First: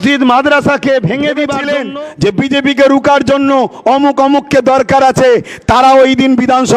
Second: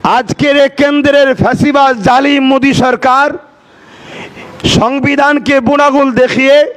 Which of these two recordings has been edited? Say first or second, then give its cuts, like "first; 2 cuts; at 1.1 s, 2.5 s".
first; 1 cut; at 1.7 s